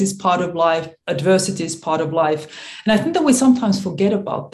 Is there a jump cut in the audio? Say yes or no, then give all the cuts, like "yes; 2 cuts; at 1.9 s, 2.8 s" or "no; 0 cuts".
yes; 1 cut; at 1.0 s